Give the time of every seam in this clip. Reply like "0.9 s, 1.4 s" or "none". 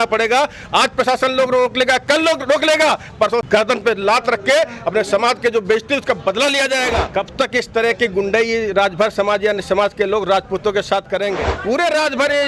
3.5 s, 7.1 s, 11.5 s